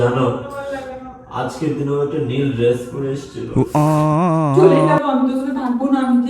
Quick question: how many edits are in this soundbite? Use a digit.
2